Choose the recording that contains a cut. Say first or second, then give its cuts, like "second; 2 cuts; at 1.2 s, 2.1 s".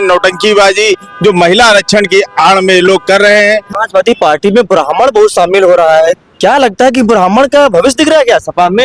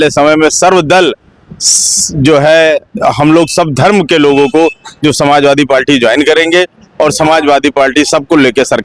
first; 1 cut; at 3.7 s